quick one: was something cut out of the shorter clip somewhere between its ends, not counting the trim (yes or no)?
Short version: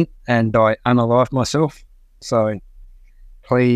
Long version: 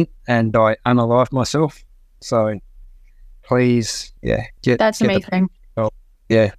no